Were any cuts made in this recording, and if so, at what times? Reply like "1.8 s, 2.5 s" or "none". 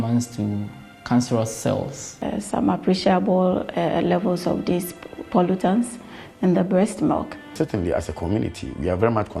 2.2 s, 7.5 s